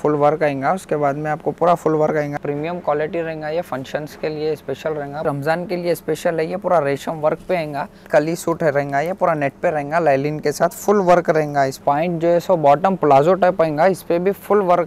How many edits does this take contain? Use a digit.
4